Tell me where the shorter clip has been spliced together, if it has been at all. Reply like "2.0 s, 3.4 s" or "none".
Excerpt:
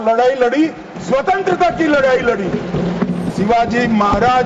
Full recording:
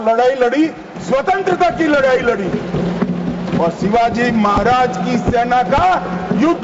3.3 s